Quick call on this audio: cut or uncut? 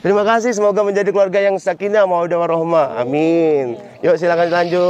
uncut